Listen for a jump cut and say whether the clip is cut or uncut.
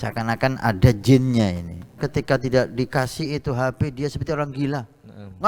cut